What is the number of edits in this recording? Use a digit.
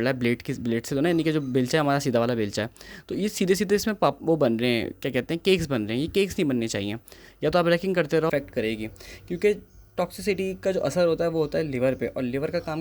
1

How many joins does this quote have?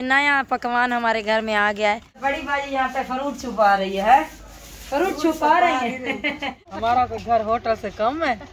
2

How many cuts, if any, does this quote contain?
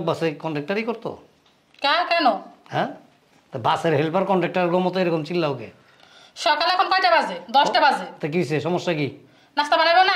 0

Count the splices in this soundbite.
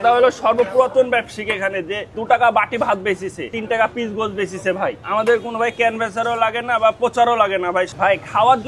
3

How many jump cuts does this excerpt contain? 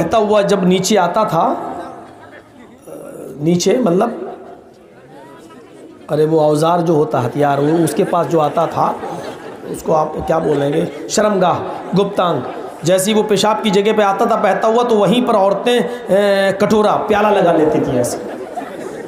0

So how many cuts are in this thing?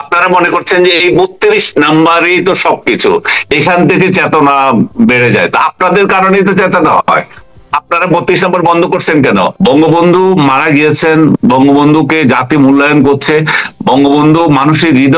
1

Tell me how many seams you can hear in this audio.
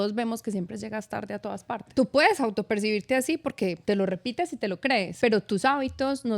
3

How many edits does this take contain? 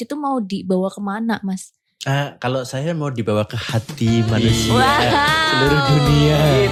0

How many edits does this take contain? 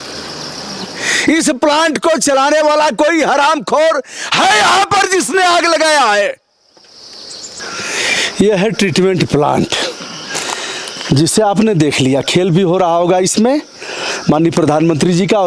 1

